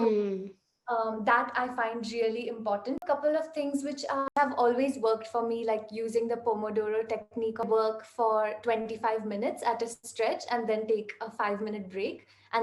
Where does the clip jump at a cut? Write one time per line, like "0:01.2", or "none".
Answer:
0:03.0
0:04.3
0:07.7